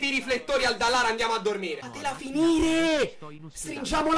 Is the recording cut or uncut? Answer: uncut